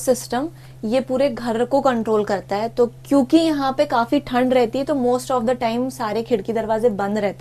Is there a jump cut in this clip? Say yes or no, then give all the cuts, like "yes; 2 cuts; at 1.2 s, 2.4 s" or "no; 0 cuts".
no; 0 cuts